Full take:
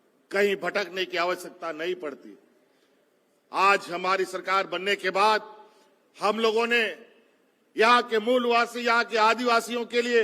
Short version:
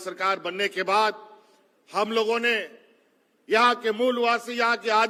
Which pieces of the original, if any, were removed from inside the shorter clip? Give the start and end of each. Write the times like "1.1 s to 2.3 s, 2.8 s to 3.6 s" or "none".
none